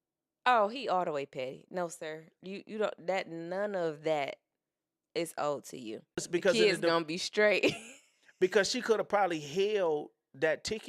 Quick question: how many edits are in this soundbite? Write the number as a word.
one